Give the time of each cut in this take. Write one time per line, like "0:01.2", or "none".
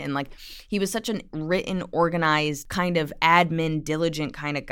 0:02.6